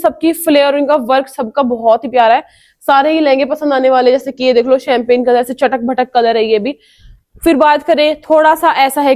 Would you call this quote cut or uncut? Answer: uncut